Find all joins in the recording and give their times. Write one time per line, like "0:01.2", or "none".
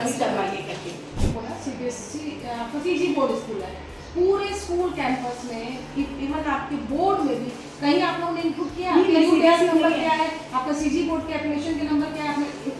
0:01.2